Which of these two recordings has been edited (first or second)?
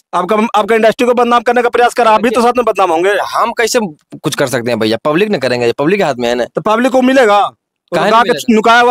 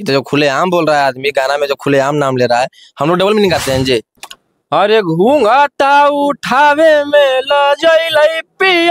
second